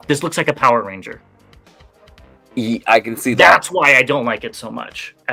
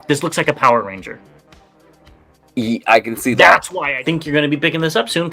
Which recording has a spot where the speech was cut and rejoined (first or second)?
second